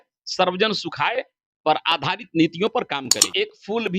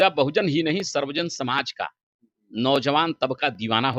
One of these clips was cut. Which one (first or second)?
first